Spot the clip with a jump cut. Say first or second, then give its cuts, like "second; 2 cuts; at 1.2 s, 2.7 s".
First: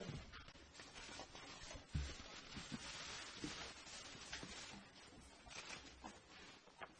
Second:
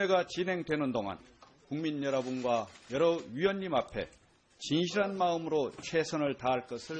second; 1 cut; at 5.3 s